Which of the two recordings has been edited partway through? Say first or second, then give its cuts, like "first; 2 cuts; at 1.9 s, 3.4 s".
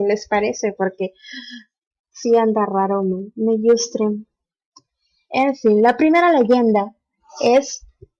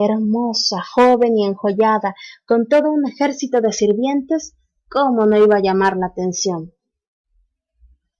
second; 1 cut; at 2.5 s